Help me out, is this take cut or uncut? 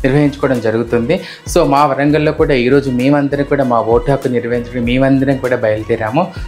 uncut